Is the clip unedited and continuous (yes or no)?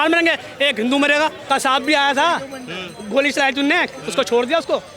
no